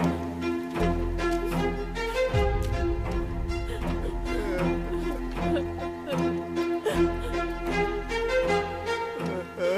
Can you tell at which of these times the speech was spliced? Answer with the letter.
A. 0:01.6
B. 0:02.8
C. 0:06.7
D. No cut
D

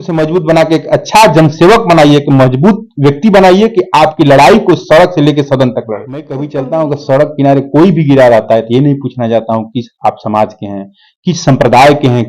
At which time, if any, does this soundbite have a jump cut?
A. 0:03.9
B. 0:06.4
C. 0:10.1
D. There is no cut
B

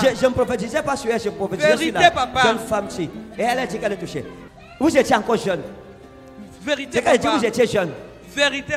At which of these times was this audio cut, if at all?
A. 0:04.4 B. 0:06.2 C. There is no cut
A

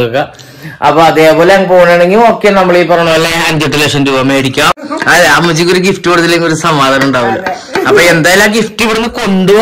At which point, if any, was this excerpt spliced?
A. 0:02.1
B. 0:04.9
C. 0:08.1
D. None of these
B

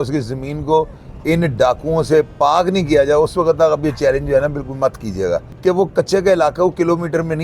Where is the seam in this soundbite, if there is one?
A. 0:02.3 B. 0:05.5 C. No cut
B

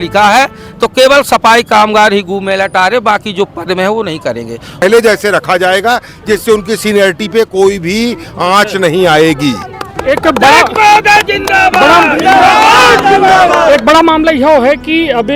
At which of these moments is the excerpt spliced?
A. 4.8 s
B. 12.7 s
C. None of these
A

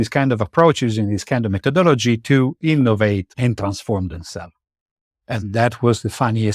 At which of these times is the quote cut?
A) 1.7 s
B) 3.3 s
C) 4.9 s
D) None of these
B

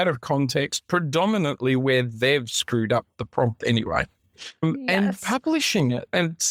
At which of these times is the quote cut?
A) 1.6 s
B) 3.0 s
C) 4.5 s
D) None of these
D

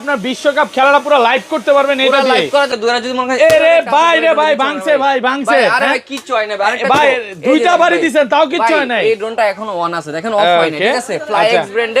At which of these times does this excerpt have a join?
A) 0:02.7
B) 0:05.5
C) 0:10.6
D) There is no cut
A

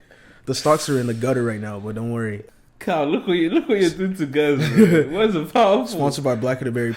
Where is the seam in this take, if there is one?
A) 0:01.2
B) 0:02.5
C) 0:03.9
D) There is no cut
B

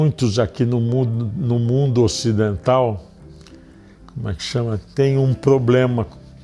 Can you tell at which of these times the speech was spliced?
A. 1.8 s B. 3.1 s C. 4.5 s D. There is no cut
D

